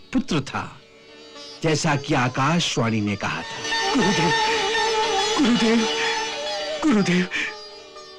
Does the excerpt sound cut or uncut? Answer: cut